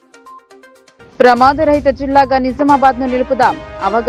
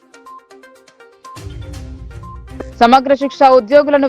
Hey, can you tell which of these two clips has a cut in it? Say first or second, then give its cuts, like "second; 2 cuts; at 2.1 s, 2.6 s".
second; 2 cuts; at 0.8 s, 2.6 s